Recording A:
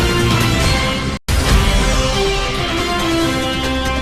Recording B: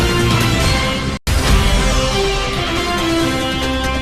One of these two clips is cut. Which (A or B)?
A